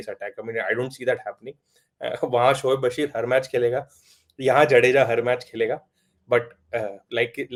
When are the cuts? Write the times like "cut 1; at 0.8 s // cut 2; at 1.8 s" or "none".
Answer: none